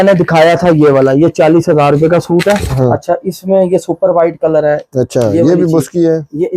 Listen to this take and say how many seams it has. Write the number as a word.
one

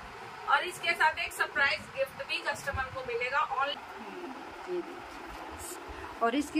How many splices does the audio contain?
one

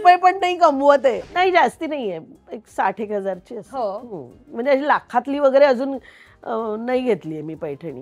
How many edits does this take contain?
one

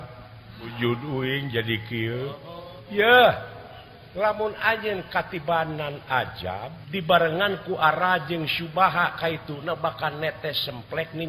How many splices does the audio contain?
three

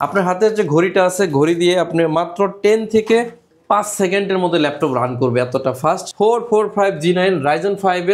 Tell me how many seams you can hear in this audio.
one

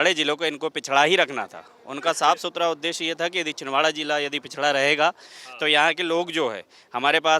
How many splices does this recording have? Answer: zero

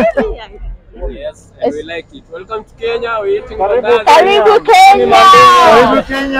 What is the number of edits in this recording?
one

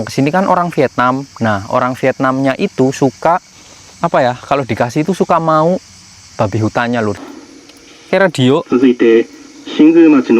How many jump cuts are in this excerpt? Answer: one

